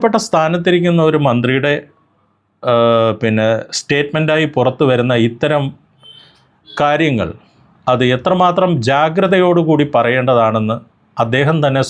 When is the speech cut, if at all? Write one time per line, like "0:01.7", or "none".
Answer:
none